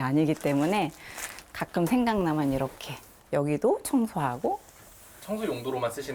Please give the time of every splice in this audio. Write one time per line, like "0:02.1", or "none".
none